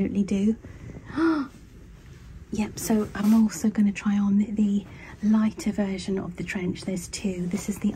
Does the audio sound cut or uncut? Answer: cut